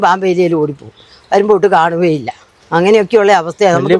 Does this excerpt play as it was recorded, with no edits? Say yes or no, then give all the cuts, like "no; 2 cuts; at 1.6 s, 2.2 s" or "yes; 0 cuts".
yes; 0 cuts